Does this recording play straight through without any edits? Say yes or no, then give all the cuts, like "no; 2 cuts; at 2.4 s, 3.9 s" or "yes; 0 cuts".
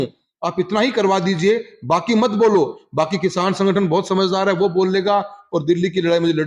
yes; 0 cuts